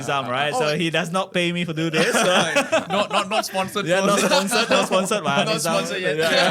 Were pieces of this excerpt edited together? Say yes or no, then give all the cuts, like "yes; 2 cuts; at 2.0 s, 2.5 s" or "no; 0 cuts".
no; 0 cuts